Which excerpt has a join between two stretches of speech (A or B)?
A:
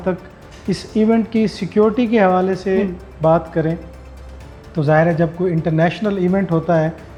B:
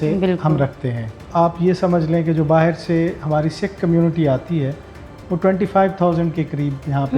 B